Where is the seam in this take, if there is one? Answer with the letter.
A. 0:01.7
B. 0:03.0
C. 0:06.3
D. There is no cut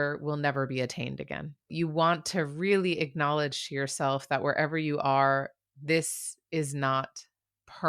A